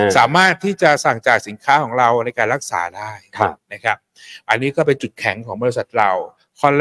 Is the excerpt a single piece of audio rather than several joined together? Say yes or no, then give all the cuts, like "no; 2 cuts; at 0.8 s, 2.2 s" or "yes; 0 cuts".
yes; 0 cuts